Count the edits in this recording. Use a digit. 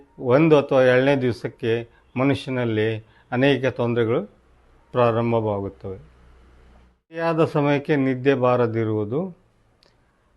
1